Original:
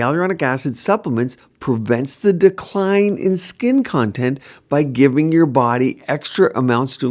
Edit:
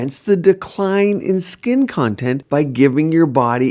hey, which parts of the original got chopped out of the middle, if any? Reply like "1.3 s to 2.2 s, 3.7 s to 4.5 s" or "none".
4.4 s to 4.6 s